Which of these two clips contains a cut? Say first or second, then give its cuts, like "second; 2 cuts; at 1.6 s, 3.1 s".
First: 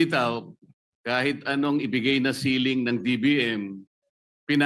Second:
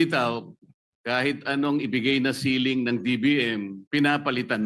second; 1 cut; at 3.8 s